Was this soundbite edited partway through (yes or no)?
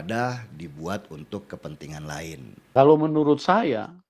yes